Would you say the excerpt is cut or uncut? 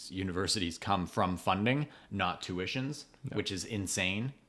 uncut